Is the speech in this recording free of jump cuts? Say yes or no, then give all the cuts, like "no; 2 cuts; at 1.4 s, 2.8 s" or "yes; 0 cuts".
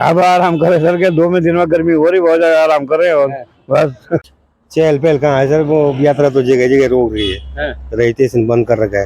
no; 1 cut; at 4.3 s